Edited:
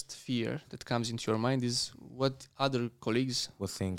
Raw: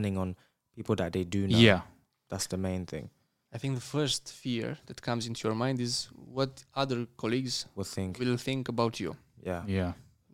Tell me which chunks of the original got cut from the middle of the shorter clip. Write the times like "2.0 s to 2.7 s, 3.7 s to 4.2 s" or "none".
none